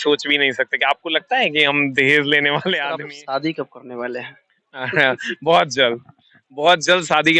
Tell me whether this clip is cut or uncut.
cut